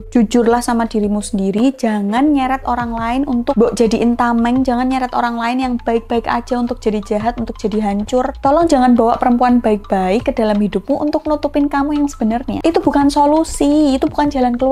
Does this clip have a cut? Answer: no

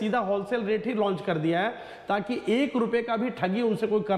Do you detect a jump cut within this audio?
no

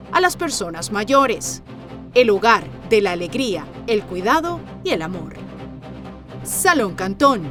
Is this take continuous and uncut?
yes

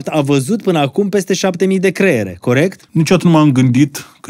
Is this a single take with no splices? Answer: no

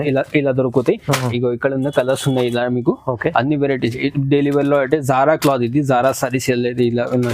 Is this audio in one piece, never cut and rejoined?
yes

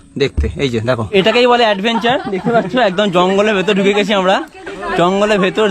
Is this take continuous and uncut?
no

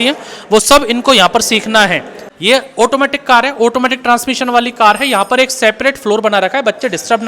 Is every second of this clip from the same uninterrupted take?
no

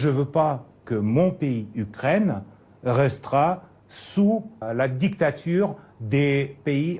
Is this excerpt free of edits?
yes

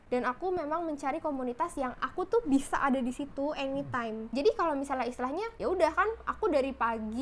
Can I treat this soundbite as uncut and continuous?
yes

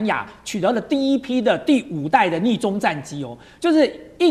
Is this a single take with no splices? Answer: yes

